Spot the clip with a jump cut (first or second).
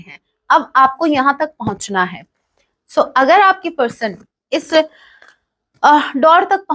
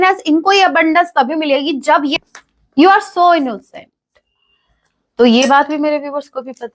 second